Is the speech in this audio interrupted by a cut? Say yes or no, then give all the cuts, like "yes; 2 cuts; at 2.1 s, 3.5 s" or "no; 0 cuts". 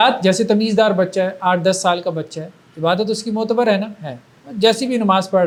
no; 0 cuts